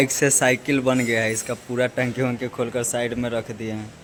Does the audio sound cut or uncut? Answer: uncut